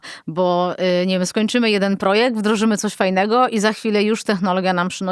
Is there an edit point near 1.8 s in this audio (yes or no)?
no